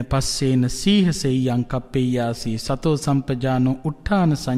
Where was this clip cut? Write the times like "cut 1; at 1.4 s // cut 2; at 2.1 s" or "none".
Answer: none